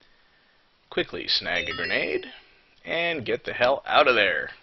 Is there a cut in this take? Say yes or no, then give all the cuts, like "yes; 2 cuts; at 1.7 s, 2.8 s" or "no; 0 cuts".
no; 0 cuts